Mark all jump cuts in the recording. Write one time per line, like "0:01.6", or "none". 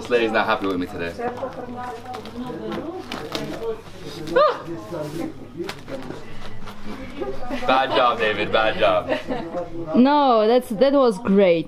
none